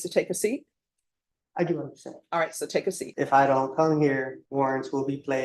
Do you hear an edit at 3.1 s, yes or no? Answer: yes